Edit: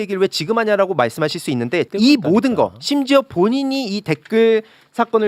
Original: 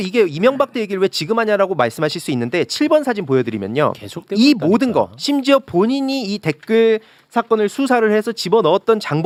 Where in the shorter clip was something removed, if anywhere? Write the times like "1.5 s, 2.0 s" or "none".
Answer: 1.9 s

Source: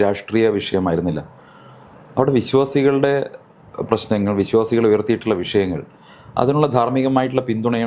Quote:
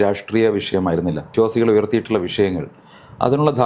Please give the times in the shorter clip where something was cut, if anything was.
1.3 s

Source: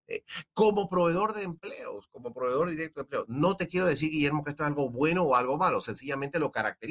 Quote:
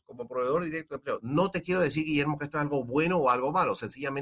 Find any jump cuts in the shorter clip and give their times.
none

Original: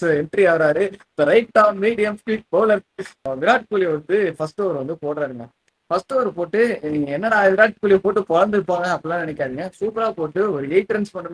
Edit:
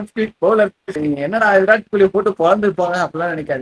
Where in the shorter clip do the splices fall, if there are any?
0.9 s

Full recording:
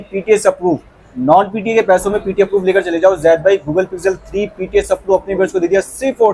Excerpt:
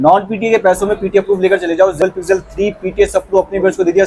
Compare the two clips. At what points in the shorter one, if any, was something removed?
2.0 s

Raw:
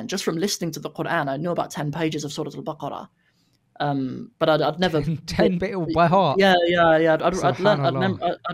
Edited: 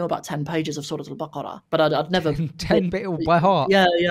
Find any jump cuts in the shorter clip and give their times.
1.6 s

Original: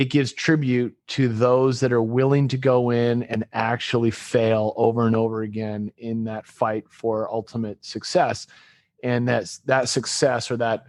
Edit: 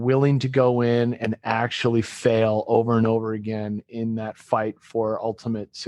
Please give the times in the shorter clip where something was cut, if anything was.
none

